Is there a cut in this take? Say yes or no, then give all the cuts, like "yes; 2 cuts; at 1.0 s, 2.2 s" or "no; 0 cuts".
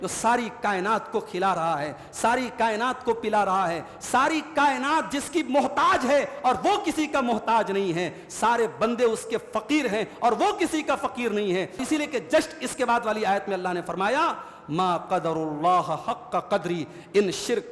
yes; 1 cut; at 11.8 s